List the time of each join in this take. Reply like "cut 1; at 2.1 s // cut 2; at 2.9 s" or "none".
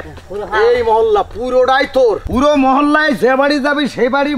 cut 1; at 2.2 s